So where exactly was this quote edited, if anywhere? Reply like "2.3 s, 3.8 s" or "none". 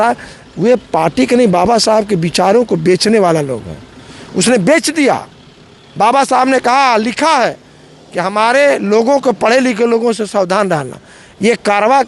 none